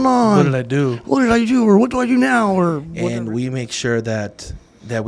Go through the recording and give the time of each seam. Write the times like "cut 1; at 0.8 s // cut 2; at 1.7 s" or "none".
cut 1; at 2.9 s